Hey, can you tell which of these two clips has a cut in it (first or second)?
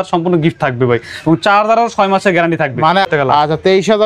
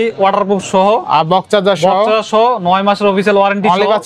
first